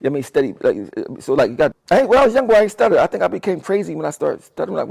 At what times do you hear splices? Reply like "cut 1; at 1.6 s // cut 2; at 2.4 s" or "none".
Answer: cut 1; at 1.8 s